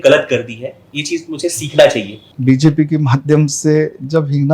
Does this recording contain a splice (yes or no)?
yes